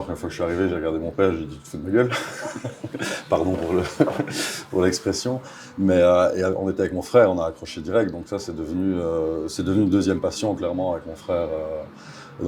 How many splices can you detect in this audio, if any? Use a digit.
0